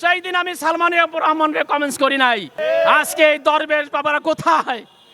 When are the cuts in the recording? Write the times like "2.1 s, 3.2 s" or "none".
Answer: 2.5 s